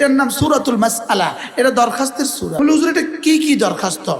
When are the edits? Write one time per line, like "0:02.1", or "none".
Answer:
0:02.5